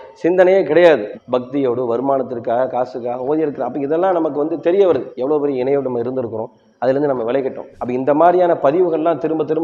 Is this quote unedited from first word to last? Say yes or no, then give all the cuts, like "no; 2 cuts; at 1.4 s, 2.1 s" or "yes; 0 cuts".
no; 1 cut; at 1.1 s